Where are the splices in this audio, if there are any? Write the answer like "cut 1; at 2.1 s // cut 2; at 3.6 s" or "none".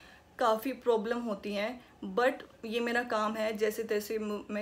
none